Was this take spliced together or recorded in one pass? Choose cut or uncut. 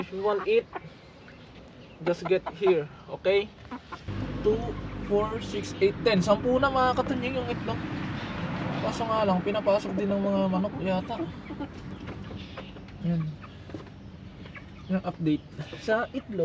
cut